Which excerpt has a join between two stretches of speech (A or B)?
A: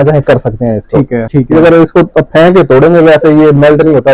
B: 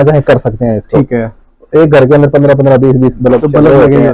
A